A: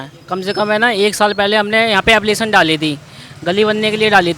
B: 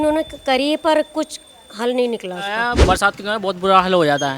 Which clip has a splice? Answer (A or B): B